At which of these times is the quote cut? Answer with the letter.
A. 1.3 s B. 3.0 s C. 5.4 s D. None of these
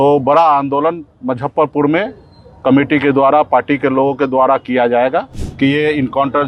C